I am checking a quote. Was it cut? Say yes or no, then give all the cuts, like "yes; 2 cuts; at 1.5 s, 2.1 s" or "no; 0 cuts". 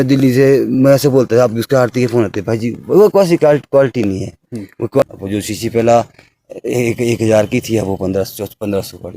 yes; 1 cut; at 5.0 s